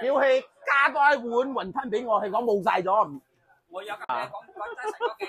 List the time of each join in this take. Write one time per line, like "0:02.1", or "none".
0:04.1

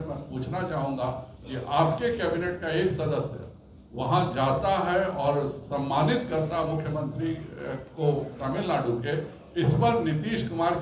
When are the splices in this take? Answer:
none

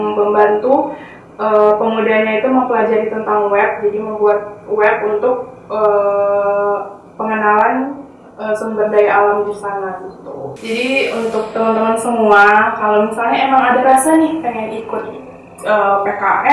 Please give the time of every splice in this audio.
0:10.5

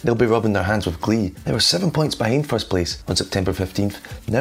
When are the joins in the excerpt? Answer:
0:01.4
0:03.0

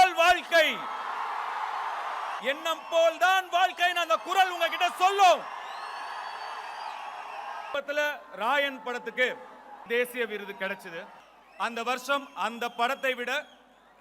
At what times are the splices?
0:02.4
0:07.7
0:09.8

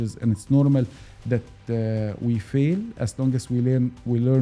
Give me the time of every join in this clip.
none

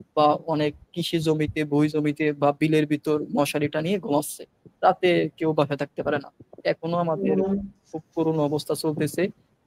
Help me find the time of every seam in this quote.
none

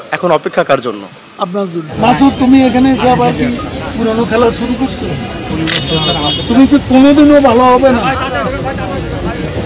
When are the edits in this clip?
0:01.9

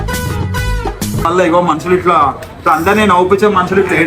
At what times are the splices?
0:01.2

